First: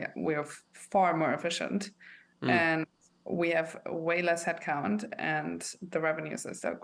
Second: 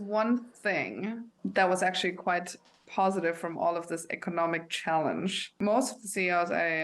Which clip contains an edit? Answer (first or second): second